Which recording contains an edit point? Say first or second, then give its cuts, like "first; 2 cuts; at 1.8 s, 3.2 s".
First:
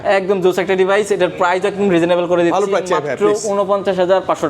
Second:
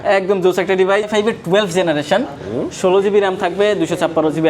second; 1 cut; at 1.1 s